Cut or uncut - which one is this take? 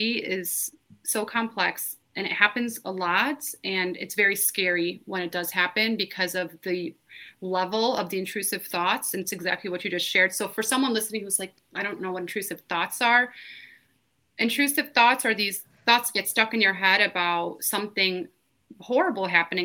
uncut